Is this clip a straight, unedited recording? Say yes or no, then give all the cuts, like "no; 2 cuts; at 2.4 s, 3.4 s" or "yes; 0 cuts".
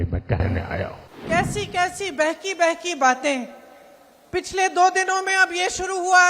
yes; 0 cuts